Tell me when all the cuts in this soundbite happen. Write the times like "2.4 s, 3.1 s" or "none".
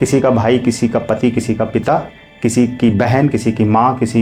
none